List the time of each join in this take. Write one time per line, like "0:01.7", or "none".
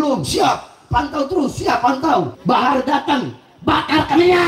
0:02.3